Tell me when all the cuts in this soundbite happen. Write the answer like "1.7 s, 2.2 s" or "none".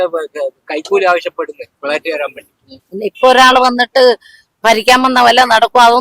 2.9 s